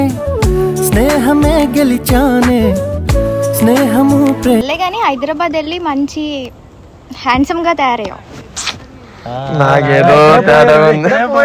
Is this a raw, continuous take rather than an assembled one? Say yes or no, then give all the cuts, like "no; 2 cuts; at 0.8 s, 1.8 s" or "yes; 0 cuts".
no; 1 cut; at 4.6 s